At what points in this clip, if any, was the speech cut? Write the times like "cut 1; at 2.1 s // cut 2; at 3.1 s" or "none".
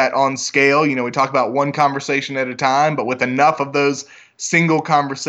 none